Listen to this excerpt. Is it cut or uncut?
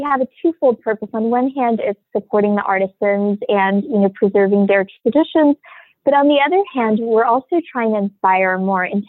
uncut